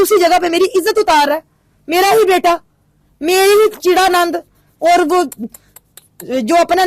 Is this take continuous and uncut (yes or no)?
yes